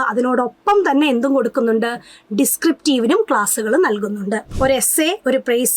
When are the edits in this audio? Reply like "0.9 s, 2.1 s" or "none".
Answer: 4.4 s